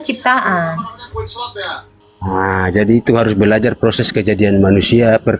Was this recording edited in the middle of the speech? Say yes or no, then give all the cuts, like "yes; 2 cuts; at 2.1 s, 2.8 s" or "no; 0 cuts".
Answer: yes; 1 cut; at 2.2 s